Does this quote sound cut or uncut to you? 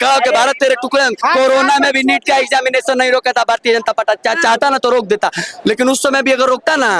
cut